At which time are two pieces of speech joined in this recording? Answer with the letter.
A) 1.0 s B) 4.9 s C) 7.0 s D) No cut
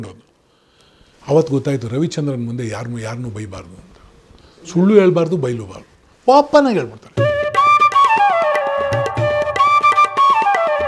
C